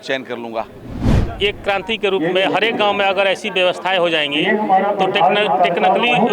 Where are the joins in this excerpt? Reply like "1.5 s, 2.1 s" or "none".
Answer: 1.2 s